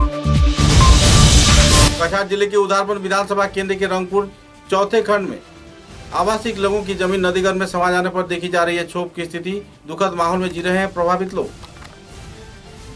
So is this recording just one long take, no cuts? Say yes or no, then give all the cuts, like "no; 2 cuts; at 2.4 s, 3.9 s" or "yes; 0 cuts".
yes; 0 cuts